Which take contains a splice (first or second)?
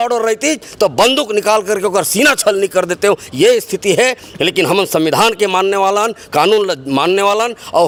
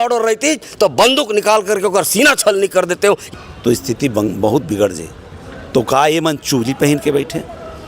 second